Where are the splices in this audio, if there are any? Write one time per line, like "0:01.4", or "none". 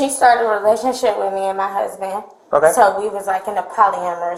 none